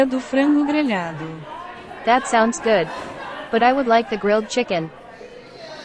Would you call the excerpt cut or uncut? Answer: cut